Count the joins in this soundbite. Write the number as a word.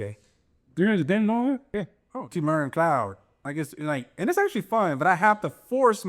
one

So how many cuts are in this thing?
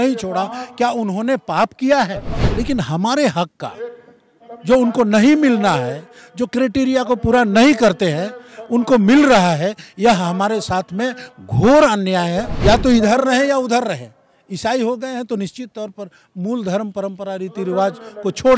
two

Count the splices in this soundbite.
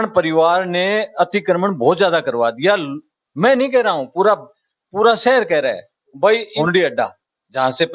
one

